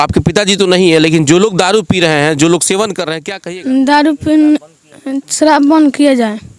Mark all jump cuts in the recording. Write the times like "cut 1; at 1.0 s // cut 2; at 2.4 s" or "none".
cut 1; at 3.2 s